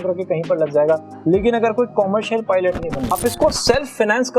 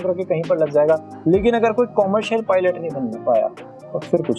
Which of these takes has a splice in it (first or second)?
first